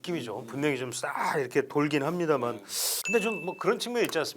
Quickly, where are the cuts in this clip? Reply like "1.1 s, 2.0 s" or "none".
3.0 s